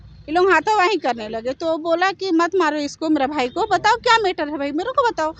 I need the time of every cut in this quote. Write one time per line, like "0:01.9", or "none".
none